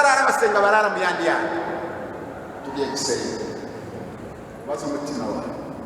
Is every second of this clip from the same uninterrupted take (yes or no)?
no